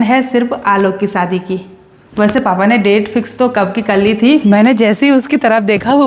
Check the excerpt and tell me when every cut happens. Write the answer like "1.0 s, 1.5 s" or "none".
4.4 s